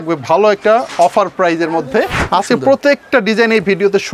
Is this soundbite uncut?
no; 1 cut; at 2.6 s

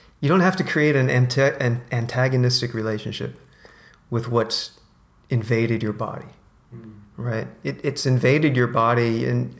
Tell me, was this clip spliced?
no; 0 cuts

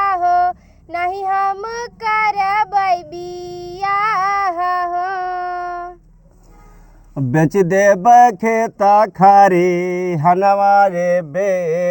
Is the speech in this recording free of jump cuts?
yes; 0 cuts

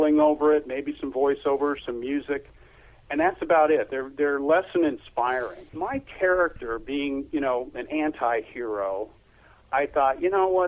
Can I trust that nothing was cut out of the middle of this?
no; 1 cut; at 5.8 s

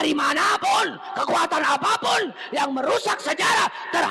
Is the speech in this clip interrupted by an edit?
no; 0 cuts

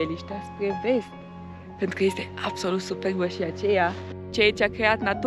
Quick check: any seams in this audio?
yes; 1 cut; at 4.3 s

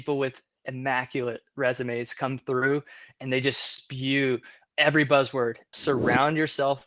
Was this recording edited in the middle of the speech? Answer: yes; 1 cut; at 5.7 s

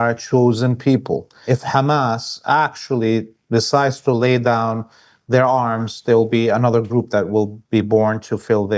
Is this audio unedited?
no; 1 cut; at 1.4 s

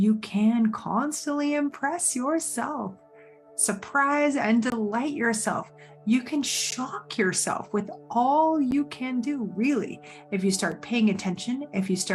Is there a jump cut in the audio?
no; 0 cuts

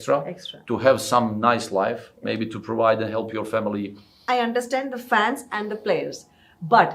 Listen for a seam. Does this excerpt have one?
yes; 1 cut; at 4.2 s

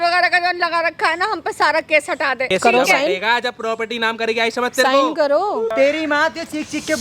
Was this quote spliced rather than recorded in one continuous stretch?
yes; 2 cuts; at 2.5 s, 5.7 s

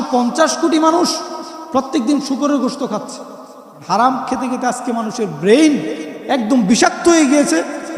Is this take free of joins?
no; 1 cut; at 3.8 s

